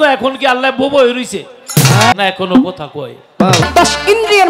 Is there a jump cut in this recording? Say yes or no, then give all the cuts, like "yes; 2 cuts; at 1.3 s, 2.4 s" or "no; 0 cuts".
yes; 2 cuts; at 2.1 s, 3.6 s